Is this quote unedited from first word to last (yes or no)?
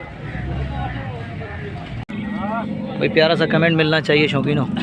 no